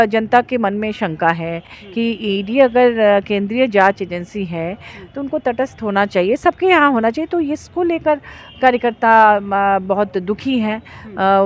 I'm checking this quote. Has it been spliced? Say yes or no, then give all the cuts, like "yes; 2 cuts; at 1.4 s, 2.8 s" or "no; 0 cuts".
no; 0 cuts